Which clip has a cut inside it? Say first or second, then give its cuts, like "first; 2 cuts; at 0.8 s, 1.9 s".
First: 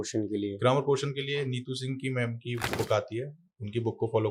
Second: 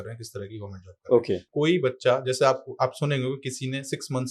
second; 1 cut; at 1.5 s